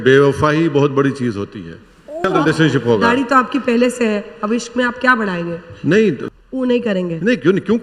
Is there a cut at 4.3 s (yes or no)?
no